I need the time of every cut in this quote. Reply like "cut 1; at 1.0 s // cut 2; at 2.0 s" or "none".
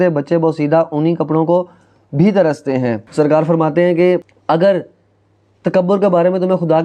cut 1; at 3.0 s // cut 2; at 4.3 s